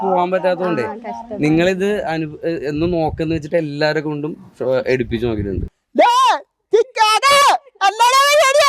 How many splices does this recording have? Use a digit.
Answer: 1